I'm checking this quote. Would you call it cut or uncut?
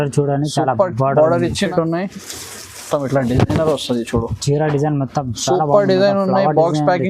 cut